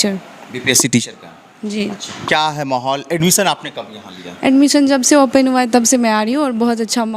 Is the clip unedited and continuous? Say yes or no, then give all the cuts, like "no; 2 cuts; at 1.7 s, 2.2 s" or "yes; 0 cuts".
yes; 0 cuts